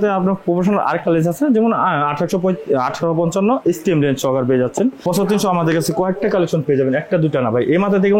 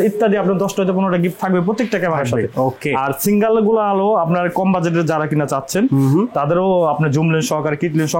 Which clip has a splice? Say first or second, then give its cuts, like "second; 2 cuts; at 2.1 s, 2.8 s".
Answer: first; 1 cut; at 5.0 s